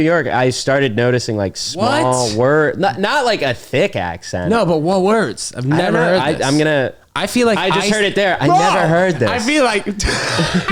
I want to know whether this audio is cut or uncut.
uncut